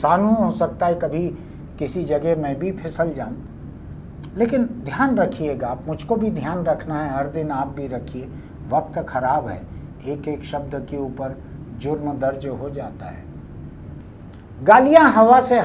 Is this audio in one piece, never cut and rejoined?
no; 1 cut; at 14.0 s

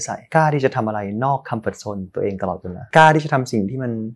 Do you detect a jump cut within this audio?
yes; 1 cut; at 2.8 s

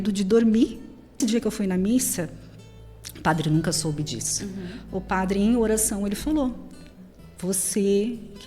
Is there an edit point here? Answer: yes; 1 cut; at 1.2 s

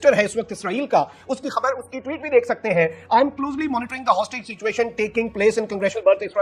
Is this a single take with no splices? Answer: yes; 0 cuts

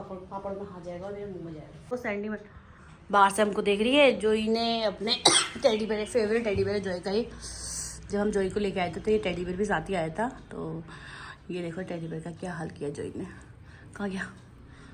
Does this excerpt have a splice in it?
no; 0 cuts

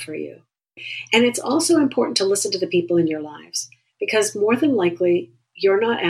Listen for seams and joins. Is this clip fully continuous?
no; 1 cut; at 0.9 s

